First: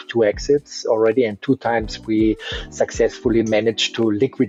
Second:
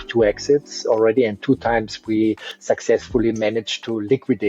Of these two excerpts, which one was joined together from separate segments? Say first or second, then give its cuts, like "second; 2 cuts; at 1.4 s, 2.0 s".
second; 1 cut; at 2.5 s